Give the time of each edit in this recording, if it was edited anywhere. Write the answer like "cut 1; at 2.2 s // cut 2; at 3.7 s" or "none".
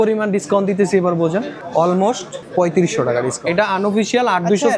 cut 1; at 1.6 s // cut 2; at 2.3 s // cut 3; at 3.3 s